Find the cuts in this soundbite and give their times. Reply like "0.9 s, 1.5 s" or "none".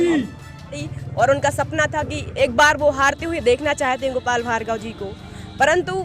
0.9 s